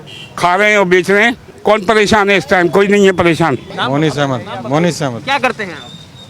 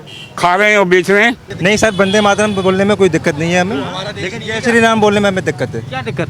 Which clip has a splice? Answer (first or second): second